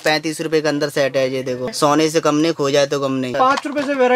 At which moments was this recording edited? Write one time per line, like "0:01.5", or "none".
0:01.7
0:03.3